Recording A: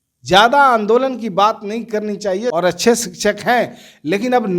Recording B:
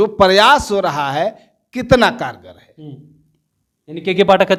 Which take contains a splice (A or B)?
A